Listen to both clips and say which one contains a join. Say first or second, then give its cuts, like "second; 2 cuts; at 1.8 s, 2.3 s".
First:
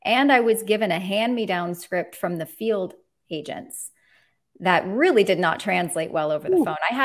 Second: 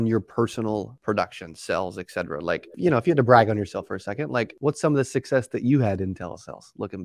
second; 3 cuts; at 0.9 s, 2.7 s, 4.5 s